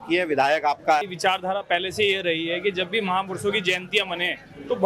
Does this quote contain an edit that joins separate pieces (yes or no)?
yes